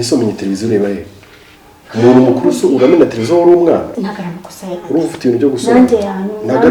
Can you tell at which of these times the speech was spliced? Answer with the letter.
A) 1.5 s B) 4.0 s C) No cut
B